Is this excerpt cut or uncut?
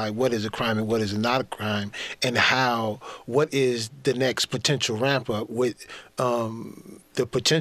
uncut